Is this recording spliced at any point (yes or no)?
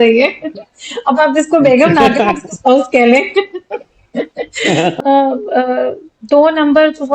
yes